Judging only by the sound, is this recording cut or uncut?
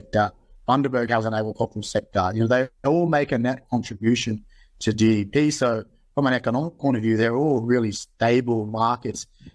uncut